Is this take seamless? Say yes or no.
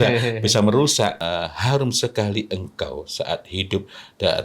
no